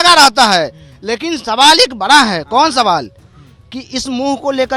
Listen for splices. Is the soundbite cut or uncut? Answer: uncut